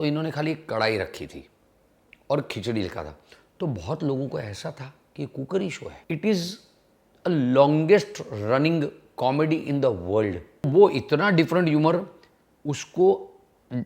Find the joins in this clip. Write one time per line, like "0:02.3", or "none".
0:05.9
0:10.7